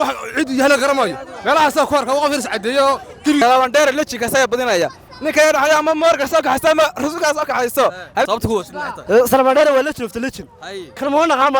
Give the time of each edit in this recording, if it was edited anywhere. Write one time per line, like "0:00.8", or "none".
0:03.4
0:08.3

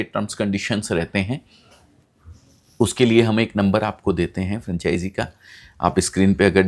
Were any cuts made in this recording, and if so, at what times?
none

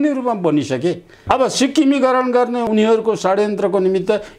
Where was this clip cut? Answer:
0:01.2
0:02.7

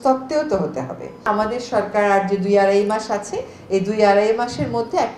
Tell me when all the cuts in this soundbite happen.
0:01.2

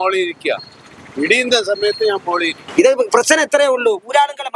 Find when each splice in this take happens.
0:02.6

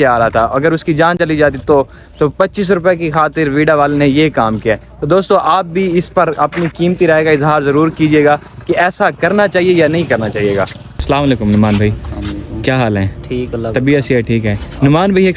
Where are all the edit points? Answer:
none

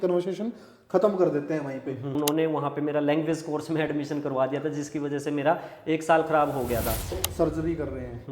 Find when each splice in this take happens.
0:02.1
0:07.2

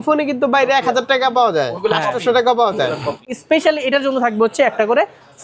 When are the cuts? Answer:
0:03.3

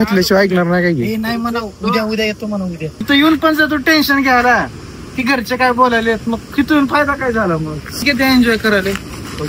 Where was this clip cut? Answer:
0:03.0
0:08.0

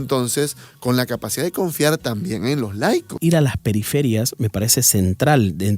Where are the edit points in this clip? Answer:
0:03.1

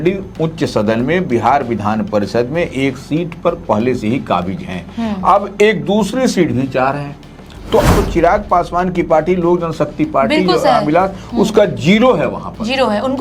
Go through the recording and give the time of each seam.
0:07.9

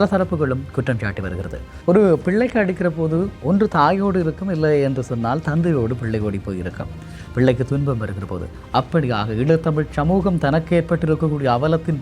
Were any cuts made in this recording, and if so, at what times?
0:01.7

